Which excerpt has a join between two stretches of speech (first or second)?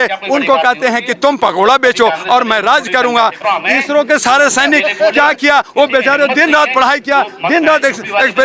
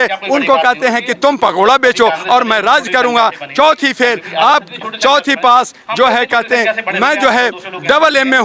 first